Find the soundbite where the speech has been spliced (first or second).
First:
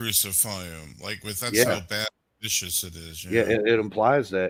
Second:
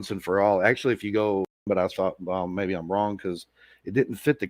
second